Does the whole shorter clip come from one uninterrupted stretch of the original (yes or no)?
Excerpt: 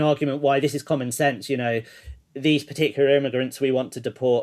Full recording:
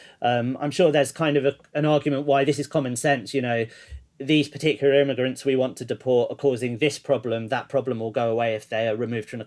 yes